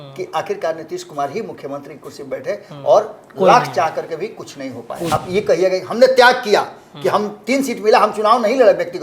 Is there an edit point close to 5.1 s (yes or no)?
yes